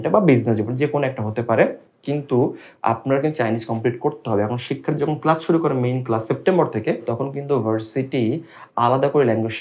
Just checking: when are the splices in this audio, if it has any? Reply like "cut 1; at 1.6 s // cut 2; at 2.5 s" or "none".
none